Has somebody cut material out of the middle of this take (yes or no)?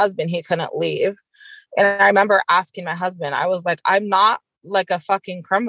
no